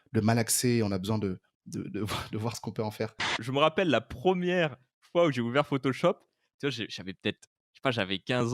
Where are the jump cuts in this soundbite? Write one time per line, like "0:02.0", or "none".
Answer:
0:03.4